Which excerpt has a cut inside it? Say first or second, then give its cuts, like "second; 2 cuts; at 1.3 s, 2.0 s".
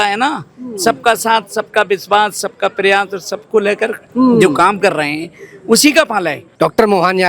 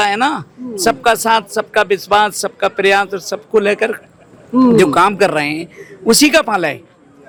first; 2 cuts; at 4.0 s, 6.4 s